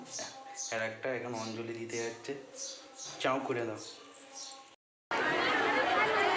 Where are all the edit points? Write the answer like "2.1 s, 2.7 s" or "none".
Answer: none